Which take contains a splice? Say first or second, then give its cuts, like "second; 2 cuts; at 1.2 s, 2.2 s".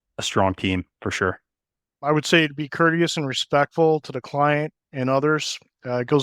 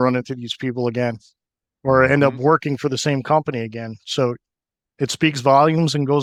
first; 1 cut; at 2.0 s